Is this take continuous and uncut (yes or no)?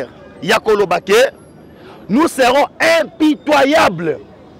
yes